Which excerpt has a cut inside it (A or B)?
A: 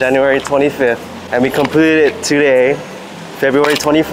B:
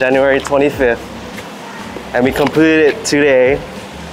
A